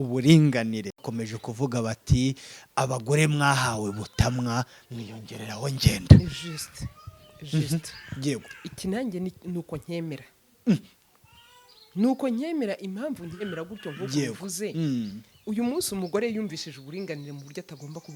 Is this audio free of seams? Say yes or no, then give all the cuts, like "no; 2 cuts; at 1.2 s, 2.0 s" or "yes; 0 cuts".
yes; 0 cuts